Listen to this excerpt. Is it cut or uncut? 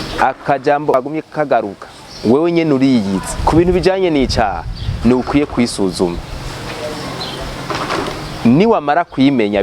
cut